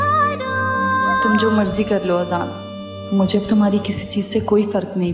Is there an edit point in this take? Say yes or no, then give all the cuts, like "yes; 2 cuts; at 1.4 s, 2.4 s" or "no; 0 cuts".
yes; 1 cut; at 1.2 s